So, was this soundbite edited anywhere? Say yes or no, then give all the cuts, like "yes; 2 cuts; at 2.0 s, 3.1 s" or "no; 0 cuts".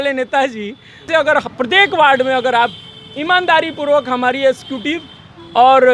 yes; 1 cut; at 1.1 s